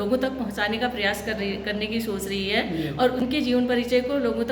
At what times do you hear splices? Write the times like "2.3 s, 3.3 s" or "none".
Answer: 3.2 s

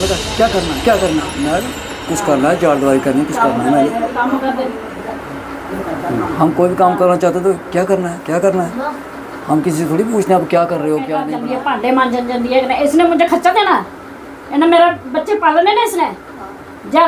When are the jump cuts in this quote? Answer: 11.3 s

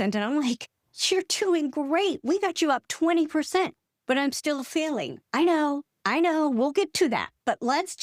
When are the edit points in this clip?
none

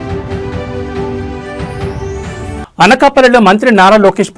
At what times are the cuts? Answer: 2.6 s

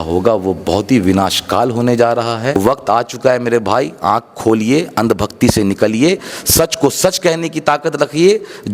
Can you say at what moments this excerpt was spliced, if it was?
2.6 s

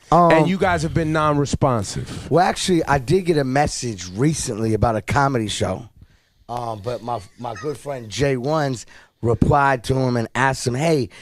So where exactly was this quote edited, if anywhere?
5.9 s

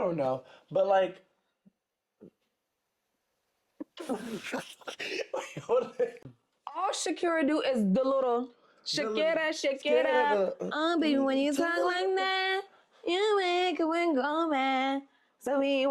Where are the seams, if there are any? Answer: 6.3 s

